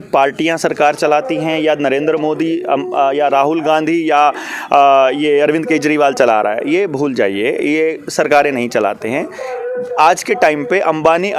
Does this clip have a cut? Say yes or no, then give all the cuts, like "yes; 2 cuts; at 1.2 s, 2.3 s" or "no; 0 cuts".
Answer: no; 0 cuts